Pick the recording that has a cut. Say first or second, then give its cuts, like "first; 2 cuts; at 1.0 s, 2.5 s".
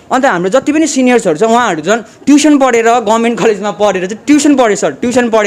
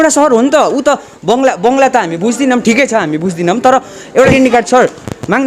second; 1 cut; at 4.3 s